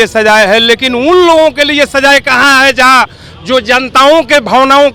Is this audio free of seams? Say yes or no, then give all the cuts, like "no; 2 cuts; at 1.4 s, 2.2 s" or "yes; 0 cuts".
yes; 0 cuts